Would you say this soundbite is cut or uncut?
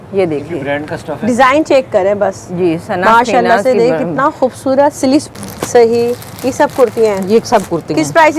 cut